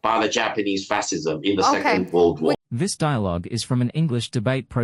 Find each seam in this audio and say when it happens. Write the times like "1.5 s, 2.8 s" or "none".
none